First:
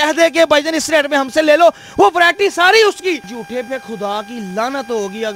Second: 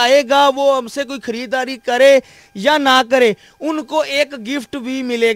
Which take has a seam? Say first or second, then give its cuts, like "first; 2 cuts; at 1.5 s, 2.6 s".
first; 1 cut; at 3.3 s